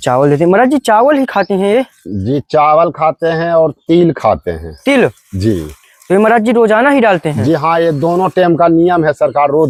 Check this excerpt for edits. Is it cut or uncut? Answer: uncut